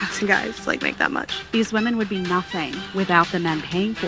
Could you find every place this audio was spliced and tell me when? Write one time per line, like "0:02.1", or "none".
0:01.4
0:02.8